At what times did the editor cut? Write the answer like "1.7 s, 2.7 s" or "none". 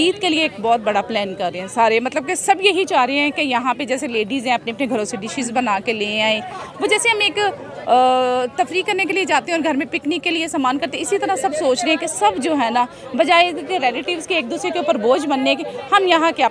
none